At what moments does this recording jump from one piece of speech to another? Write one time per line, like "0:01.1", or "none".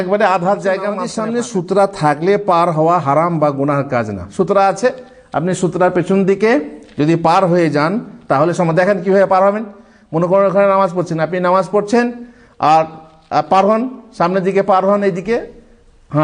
0:01.1